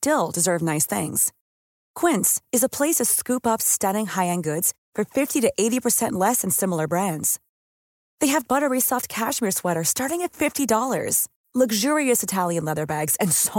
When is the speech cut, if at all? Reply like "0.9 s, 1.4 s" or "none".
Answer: none